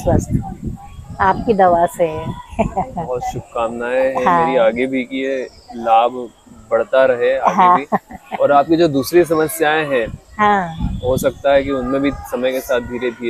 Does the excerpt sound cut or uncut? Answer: uncut